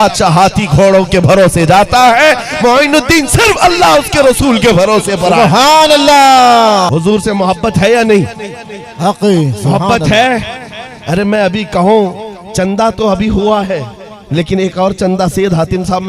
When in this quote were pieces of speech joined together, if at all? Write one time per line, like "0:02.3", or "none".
0:06.9